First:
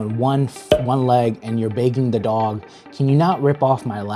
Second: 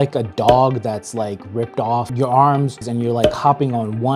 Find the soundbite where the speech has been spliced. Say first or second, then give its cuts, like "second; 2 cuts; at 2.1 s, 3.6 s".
second; 2 cuts; at 2.1 s, 2.9 s